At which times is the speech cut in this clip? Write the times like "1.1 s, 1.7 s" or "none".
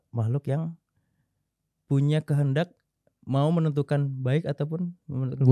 none